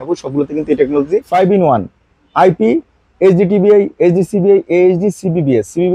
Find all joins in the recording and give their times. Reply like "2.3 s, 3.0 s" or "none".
1.2 s